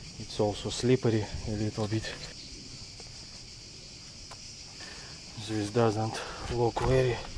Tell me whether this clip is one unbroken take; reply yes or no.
no